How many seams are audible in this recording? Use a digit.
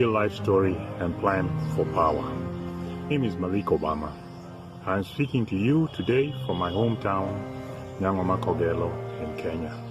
1